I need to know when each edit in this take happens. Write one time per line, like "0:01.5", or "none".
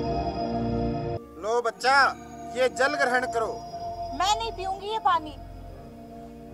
0:01.2

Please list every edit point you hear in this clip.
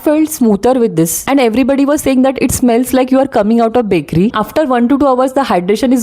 0:01.2
0:04.3

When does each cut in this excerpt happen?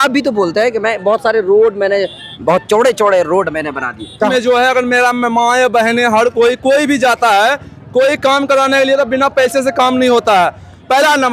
0:02.4
0:04.3

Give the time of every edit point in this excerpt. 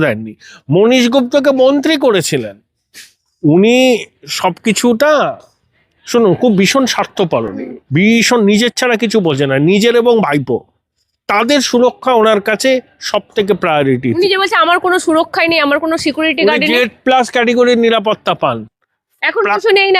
none

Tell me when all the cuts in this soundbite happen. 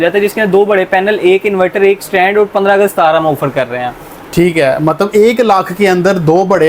none

